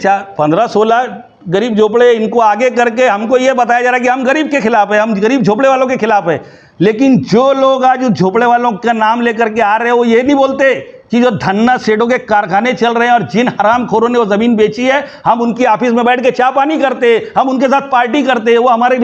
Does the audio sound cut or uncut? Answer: uncut